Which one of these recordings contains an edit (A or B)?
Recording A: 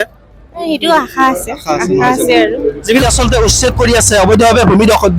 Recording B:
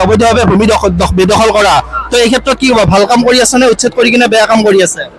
A